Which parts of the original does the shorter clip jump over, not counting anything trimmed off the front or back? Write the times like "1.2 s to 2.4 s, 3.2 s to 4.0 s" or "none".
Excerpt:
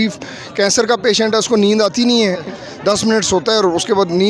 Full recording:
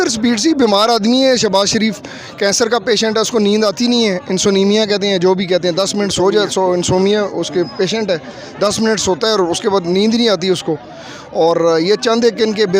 4.3 s to 8.2 s